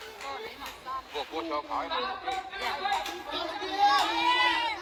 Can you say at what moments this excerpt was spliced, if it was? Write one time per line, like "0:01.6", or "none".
none